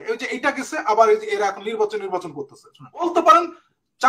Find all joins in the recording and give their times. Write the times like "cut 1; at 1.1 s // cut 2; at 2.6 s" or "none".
cut 1; at 3.0 s